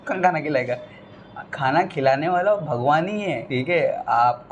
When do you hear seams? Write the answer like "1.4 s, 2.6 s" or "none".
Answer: 3.4 s